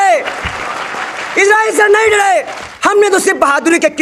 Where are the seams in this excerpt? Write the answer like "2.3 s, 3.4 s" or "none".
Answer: 2.6 s